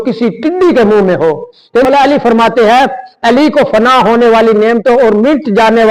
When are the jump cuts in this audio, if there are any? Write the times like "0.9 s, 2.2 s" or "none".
1.8 s